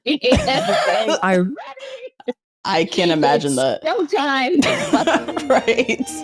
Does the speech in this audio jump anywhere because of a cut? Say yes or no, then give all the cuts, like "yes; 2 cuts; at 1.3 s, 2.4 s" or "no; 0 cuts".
no; 0 cuts